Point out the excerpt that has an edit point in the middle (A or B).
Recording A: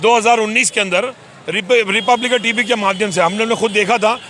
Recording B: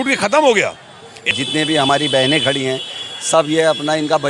B